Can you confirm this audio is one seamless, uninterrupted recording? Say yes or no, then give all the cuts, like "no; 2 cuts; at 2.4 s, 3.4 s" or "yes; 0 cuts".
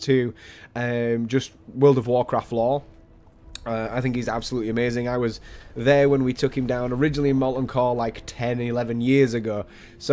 yes; 0 cuts